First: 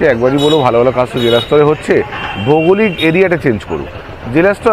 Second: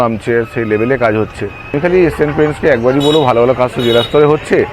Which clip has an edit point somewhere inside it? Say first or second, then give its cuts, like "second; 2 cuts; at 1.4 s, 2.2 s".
second; 1 cut; at 1.6 s